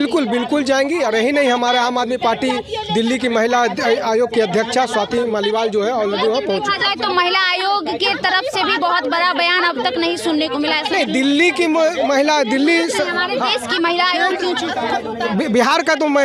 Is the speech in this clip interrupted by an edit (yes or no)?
no